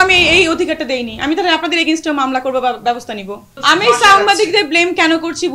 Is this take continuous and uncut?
no; 1 cut; at 3.4 s

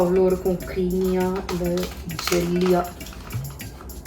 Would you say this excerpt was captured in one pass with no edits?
yes; 0 cuts

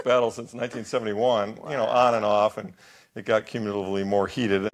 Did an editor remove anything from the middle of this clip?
no; 0 cuts

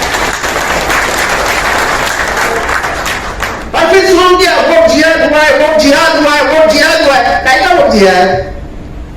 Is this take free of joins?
no; 1 cut; at 3.6 s

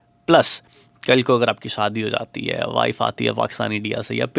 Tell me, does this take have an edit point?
no; 0 cuts

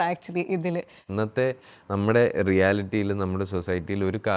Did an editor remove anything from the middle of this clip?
yes; 1 cut; at 1.1 s

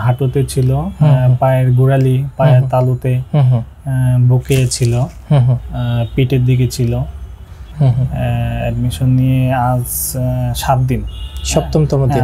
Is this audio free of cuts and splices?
no; 1 cut; at 7.6 s

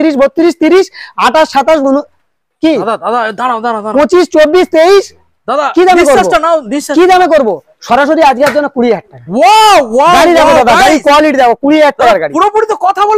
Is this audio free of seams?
yes; 0 cuts

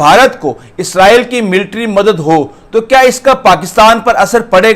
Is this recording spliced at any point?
no; 0 cuts

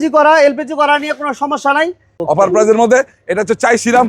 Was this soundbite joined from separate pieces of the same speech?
yes; 1 cut; at 2.1 s

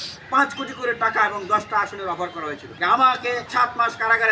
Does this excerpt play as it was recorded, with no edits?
no; 2 cuts; at 2.7 s, 3.5 s

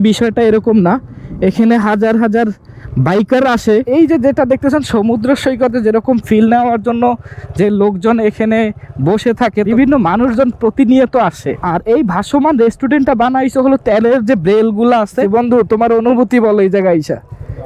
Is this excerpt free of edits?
no; 4 cuts; at 3.9 s, 9.7 s, 11.6 s, 15.2 s

